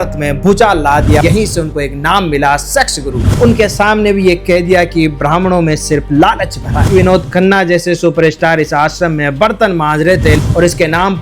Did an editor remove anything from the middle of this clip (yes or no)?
yes